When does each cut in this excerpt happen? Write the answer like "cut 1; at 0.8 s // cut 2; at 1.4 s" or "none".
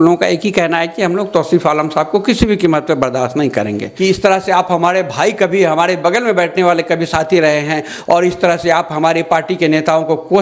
cut 1; at 3.8 s